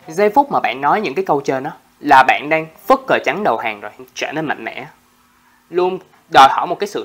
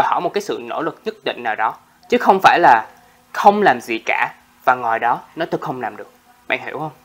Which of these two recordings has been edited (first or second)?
first